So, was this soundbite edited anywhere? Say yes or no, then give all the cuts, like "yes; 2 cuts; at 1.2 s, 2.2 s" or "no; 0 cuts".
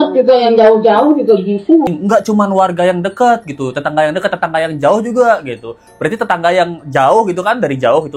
yes; 1 cut; at 1.9 s